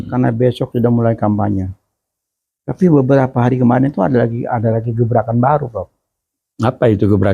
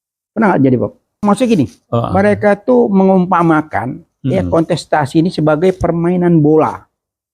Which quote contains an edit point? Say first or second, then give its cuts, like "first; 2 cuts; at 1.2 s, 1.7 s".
second; 1 cut; at 1.2 s